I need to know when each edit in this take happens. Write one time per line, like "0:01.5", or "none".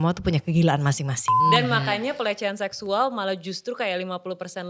0:01.3